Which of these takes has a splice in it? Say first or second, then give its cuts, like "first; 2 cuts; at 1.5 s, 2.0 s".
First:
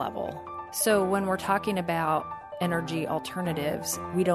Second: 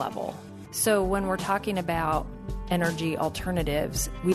first; 1 cut; at 2.4 s